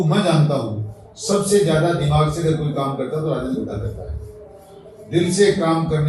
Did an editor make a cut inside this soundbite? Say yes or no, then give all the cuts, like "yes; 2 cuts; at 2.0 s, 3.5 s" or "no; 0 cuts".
no; 0 cuts